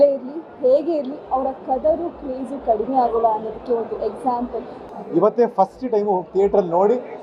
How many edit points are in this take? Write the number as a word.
one